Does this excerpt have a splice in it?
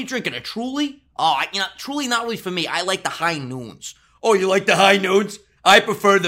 no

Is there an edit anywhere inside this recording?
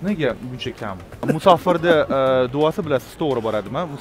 yes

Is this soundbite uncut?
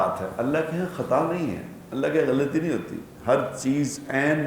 yes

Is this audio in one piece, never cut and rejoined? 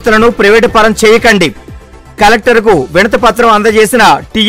yes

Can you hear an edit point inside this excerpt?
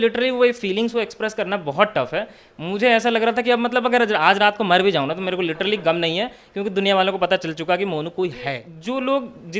yes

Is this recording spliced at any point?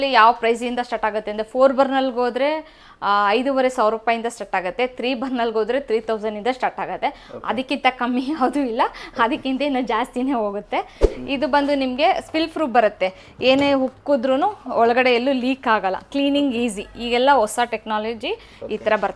yes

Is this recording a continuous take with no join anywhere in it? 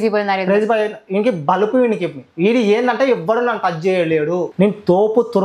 no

